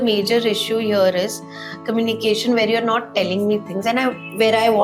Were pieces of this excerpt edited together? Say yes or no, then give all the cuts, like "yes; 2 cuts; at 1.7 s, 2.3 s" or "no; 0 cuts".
no; 0 cuts